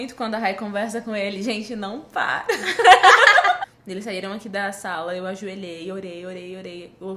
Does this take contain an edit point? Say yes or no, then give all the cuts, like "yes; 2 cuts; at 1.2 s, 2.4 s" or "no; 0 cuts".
yes; 1 cut; at 3.6 s